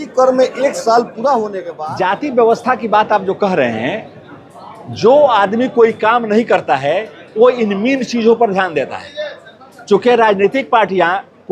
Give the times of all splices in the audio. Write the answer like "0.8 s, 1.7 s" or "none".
1.7 s